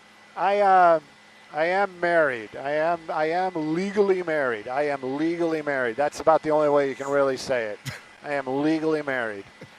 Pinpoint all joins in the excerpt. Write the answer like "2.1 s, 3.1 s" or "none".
4.8 s